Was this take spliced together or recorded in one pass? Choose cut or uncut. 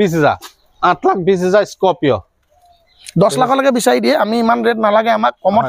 uncut